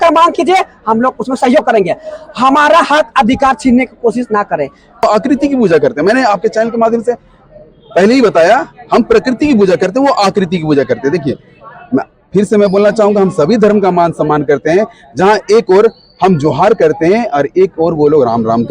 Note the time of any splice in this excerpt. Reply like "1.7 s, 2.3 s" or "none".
5.0 s